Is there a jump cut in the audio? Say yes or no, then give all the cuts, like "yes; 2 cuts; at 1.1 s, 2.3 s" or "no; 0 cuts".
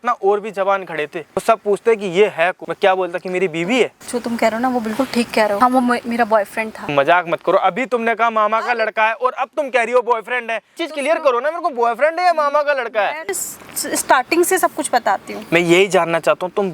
yes; 7 cuts; at 1.4 s, 2.6 s, 4.0 s, 5.6 s, 6.9 s, 10.8 s, 13.3 s